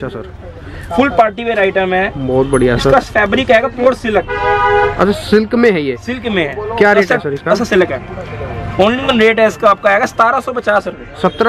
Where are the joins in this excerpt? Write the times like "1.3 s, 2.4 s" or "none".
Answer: none